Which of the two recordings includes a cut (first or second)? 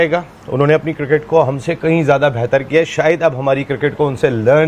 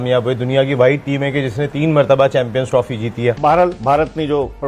second